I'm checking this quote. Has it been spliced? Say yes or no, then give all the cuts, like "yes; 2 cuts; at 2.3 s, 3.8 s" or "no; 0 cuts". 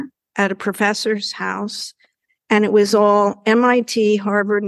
no; 0 cuts